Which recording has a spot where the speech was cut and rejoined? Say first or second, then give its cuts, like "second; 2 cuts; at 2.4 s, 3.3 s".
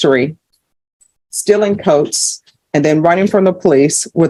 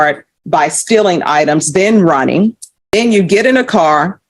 second; 1 cut; at 2.7 s